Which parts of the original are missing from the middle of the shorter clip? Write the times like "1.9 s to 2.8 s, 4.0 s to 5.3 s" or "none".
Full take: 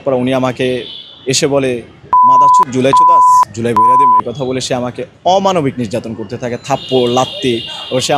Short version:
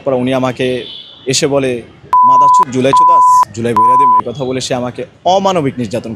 none